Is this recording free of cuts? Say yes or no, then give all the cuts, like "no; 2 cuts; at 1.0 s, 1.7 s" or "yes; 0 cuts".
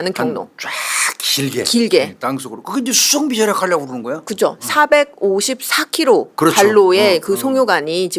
yes; 0 cuts